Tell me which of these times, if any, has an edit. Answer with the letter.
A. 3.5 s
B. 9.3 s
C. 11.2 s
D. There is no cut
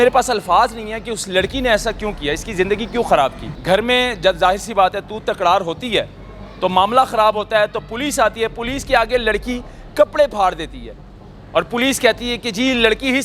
A